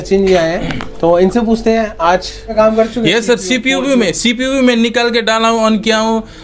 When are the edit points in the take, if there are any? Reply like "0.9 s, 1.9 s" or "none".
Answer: 2.4 s